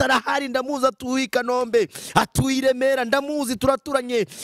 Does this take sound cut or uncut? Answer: uncut